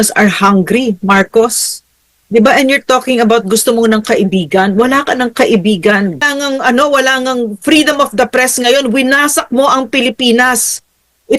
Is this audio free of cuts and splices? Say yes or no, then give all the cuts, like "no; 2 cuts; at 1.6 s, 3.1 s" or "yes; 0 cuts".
no; 1 cut; at 6.2 s